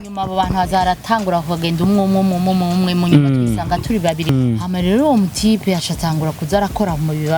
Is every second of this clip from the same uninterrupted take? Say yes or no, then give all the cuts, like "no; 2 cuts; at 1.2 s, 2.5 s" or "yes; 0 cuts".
no; 1 cut; at 4.3 s